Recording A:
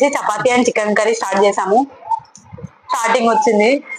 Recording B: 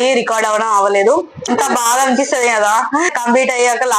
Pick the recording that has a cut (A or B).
B